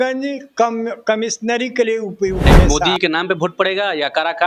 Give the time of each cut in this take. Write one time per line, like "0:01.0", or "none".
0:02.7